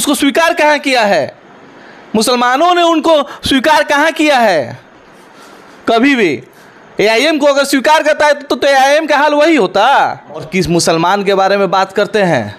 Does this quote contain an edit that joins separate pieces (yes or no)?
yes